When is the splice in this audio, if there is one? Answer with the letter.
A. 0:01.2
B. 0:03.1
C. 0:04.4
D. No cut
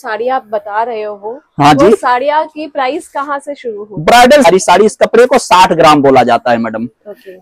C